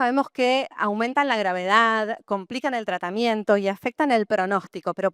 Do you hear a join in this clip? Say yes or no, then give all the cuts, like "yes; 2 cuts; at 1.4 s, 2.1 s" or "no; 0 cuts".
no; 0 cuts